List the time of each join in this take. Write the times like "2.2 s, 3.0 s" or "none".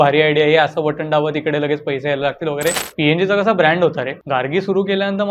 2.9 s, 4.1 s